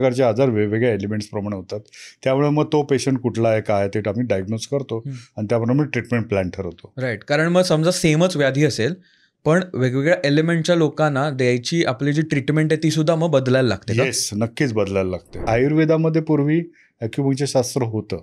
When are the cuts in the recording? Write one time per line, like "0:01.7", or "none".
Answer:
0:15.4

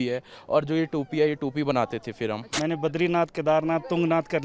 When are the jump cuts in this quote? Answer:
0:02.5

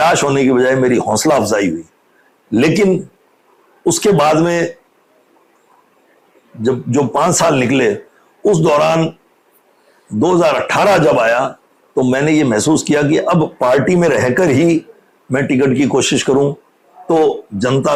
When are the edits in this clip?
none

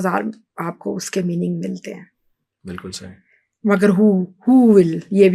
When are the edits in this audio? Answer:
none

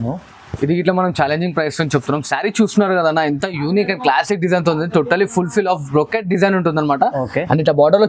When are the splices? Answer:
none

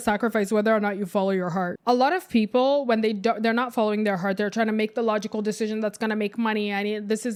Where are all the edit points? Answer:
none

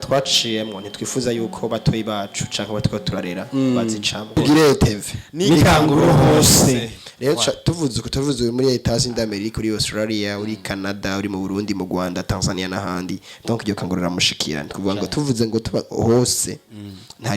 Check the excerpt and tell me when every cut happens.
0:04.3

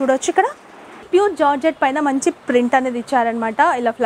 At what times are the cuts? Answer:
0:01.1

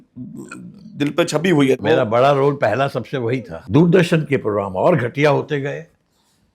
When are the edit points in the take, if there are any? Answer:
0:01.8
0:03.5

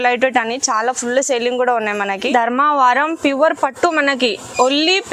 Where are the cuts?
0:02.2

